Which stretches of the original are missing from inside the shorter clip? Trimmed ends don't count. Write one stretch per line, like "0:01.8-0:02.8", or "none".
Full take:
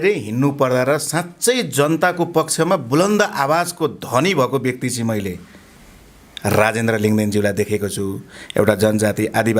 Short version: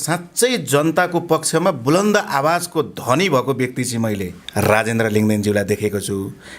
0:05.4-0:06.3